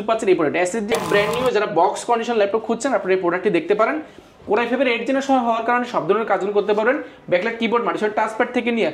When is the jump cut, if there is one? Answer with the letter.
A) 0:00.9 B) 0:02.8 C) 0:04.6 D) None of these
A